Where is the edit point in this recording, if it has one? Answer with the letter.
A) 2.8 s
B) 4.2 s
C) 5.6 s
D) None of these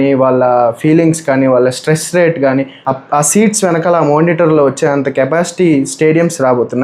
A